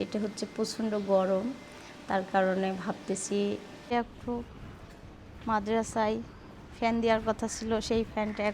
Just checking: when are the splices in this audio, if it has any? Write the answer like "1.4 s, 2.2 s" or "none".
3.7 s